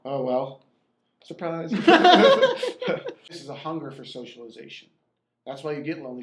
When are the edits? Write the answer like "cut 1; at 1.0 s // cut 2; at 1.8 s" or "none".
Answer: cut 1; at 3.4 s